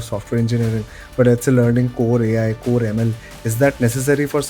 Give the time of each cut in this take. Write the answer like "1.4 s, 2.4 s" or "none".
none